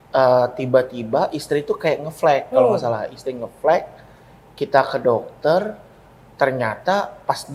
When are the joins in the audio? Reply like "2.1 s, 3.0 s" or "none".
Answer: none